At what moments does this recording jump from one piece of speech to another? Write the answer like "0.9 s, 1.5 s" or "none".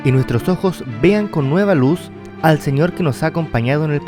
none

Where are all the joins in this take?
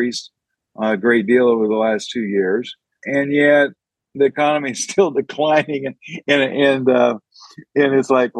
3.0 s

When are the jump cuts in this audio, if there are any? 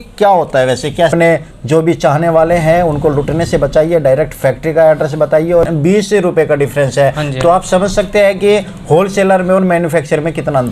1.1 s, 5.7 s

